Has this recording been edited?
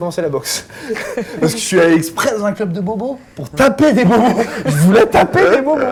no; 0 cuts

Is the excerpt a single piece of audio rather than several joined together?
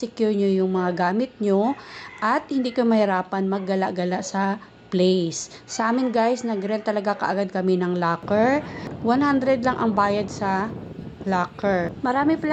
yes; 0 cuts

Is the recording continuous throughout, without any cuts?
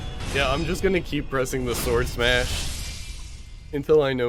yes; 0 cuts

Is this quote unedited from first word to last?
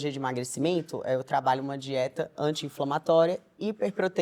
yes; 0 cuts

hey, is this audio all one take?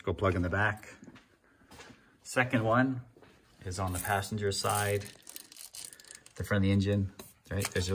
no; 1 cut; at 1.4 s

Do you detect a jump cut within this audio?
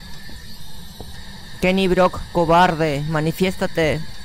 no; 0 cuts

